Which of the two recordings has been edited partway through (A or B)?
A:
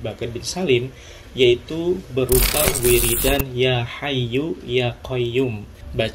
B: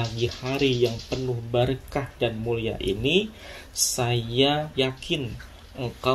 B